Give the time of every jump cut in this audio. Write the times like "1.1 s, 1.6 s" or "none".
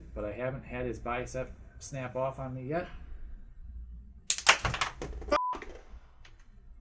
5.2 s